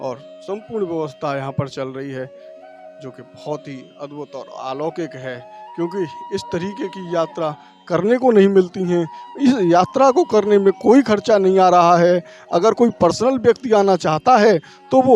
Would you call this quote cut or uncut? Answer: uncut